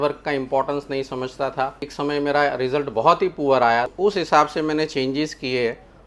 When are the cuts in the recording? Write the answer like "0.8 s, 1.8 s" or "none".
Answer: 1.9 s, 3.9 s